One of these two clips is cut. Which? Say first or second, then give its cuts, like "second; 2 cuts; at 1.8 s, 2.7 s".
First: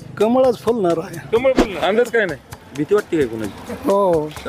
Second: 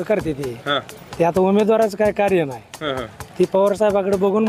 first; 1 cut; at 1.7 s